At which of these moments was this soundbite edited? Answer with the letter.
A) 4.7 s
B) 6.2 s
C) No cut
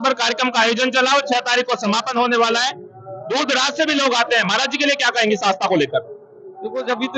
C